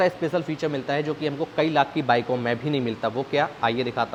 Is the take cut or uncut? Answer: uncut